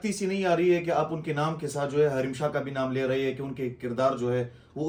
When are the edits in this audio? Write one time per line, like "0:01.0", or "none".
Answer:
none